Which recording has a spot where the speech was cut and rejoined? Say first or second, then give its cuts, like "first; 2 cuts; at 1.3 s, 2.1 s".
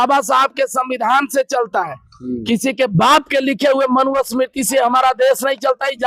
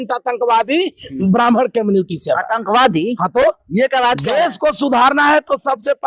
second; 1 cut; at 4.2 s